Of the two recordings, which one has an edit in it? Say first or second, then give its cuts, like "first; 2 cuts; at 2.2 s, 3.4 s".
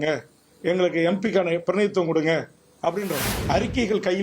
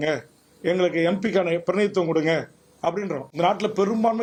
first; 1 cut; at 3.2 s